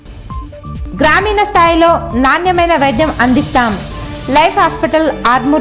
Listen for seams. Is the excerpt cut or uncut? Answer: cut